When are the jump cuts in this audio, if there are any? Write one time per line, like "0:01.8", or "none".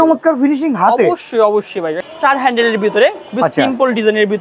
0:02.0